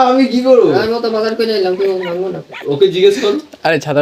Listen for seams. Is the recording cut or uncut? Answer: uncut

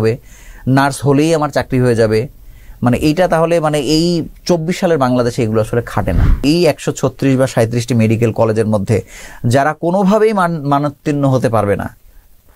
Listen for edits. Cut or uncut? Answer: cut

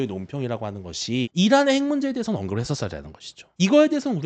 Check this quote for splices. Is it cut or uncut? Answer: cut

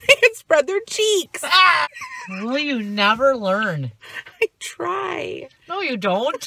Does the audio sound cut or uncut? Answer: cut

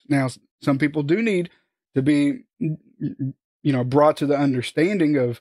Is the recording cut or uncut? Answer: uncut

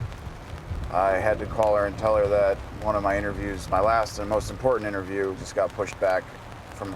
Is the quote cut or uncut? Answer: cut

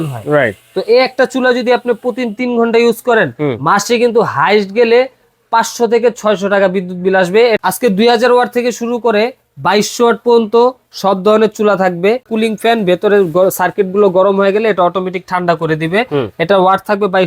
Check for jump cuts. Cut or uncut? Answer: cut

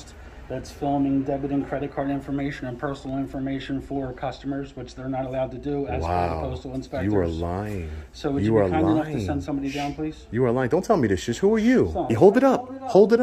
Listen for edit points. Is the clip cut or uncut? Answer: cut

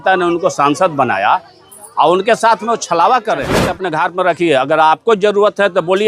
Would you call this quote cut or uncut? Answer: cut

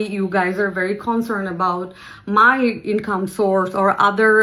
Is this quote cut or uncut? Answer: uncut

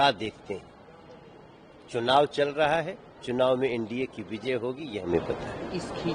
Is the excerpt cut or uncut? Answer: uncut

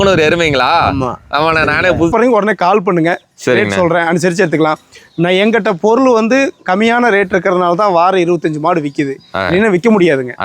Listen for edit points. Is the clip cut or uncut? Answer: cut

